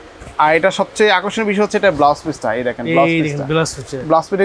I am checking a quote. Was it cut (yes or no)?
no